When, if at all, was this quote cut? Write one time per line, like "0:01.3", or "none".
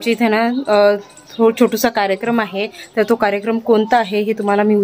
none

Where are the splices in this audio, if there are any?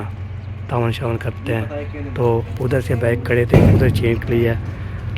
none

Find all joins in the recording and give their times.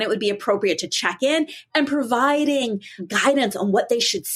0:03.0

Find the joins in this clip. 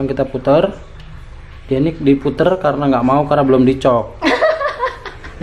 none

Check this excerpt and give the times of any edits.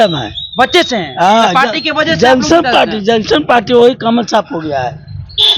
none

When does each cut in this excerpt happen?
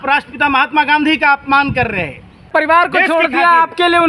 0:02.5

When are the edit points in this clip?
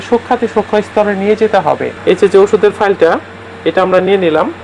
0:01.9

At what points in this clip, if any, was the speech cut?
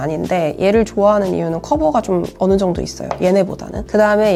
none

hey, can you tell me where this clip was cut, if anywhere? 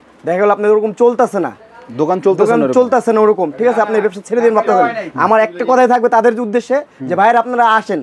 none

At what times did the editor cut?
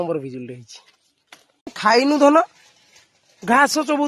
0:01.7

